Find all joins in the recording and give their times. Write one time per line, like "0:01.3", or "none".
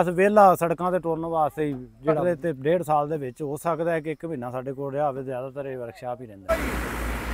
0:02.2
0:06.5